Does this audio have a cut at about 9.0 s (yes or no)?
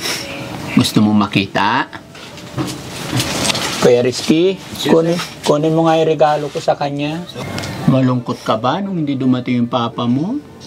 no